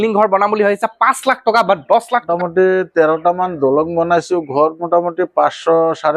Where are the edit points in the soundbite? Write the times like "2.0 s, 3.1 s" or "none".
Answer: 2.3 s